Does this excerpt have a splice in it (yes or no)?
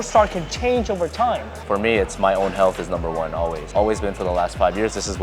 yes